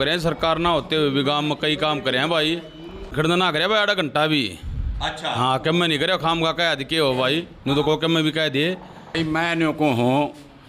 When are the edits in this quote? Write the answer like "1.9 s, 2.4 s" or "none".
3.1 s, 9.1 s

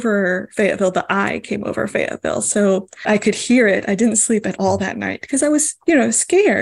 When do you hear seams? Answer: 3.1 s

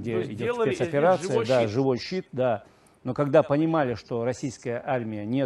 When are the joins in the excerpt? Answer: none

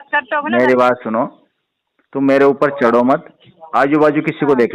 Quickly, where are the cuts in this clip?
none

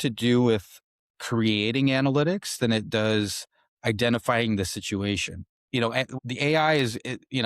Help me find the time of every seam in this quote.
5.9 s

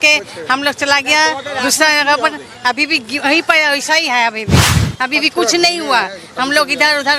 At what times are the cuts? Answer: none

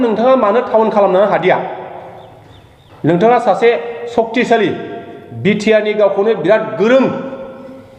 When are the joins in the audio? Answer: none

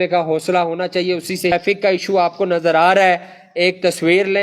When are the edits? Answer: 1.5 s

